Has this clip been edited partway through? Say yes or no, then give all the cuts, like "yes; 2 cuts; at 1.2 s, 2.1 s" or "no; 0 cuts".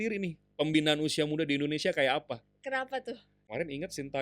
yes; 1 cut; at 3.3 s